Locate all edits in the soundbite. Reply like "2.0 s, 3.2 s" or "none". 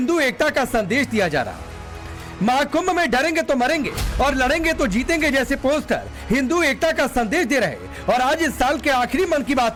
none